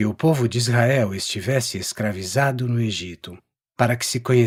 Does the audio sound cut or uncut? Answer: uncut